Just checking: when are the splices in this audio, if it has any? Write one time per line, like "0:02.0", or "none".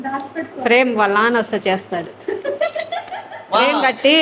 none